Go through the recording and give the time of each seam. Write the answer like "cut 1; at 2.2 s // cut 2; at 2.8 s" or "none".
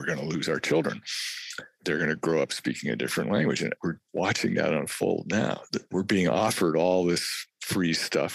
cut 1; at 3.8 s // cut 2; at 5.9 s